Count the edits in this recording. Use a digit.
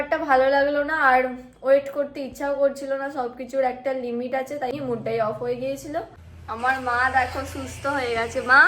2